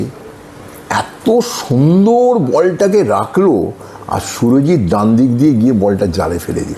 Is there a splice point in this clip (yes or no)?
no